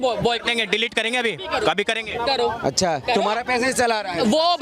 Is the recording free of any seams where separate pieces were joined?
yes; 0 cuts

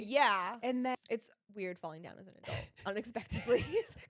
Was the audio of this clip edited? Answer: yes; 1 cut; at 1.0 s

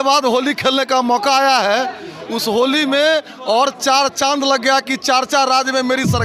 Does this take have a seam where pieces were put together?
no; 0 cuts

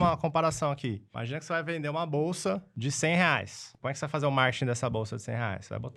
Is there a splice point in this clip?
yes; 3 cuts; at 1.1 s, 2.8 s, 3.8 s

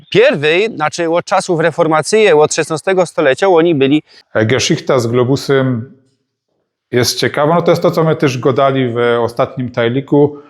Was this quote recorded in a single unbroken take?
no; 1 cut; at 4.2 s

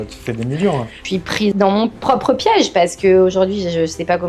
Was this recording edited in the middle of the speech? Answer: yes; 1 cut; at 1.4 s

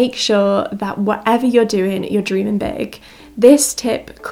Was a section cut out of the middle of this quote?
yes; 1 cut; at 3.2 s

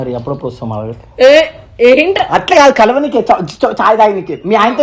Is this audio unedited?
yes; 0 cuts

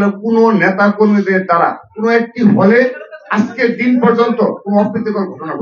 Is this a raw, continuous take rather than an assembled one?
yes; 0 cuts

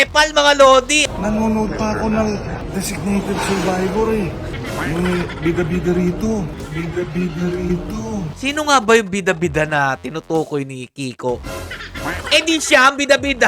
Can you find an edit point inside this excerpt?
yes; 4 cuts; at 0.9 s, 2.6 s, 4.5 s, 8.3 s

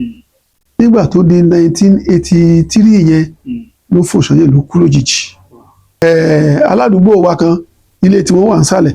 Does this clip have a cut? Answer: yes; 1 cut; at 6.0 s

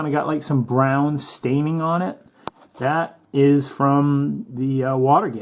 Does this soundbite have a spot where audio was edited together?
no; 0 cuts

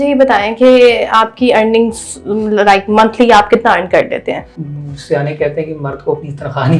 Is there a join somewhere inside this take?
no; 0 cuts

